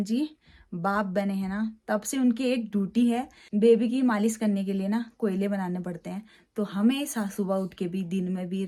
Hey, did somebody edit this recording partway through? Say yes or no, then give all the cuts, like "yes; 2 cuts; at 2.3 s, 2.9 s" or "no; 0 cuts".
no; 0 cuts